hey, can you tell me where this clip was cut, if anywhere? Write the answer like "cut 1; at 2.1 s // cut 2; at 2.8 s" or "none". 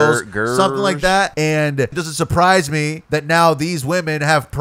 cut 1; at 1.3 s // cut 2; at 2.0 s // cut 3; at 3.0 s

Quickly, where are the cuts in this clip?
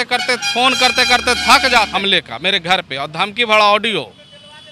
cut 1; at 1.9 s

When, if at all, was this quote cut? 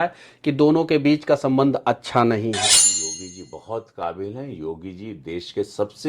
cut 1; at 2.9 s

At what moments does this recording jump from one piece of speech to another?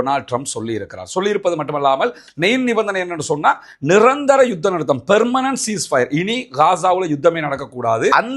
cut 1; at 2.2 s

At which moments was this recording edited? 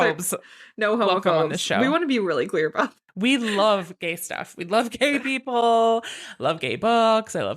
cut 1; at 3.0 s

